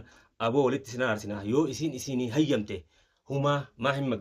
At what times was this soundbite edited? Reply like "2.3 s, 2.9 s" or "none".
none